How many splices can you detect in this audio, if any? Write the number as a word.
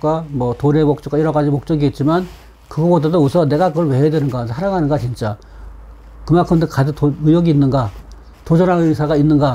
zero